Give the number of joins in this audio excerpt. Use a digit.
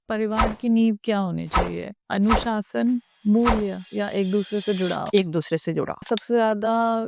2